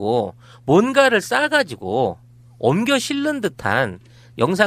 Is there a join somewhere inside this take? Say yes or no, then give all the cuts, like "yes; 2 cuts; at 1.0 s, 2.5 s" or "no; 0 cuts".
yes; 1 cut; at 3.3 s